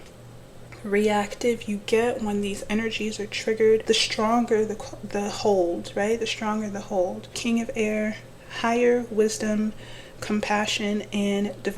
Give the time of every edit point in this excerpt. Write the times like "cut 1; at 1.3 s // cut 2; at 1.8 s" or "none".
cut 1; at 3.8 s // cut 2; at 7.4 s